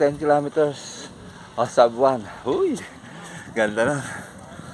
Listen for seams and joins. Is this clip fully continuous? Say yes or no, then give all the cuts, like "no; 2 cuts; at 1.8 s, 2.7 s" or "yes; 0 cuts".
yes; 0 cuts